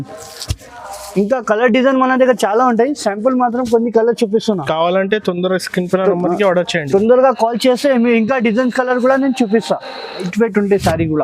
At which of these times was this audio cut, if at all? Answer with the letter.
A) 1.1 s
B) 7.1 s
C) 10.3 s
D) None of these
C